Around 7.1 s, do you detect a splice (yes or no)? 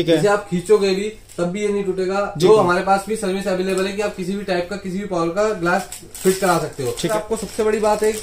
yes